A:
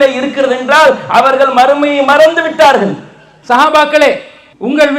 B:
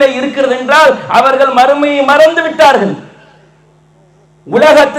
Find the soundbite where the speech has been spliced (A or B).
A